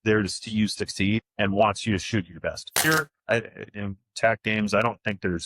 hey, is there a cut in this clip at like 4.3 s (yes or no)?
no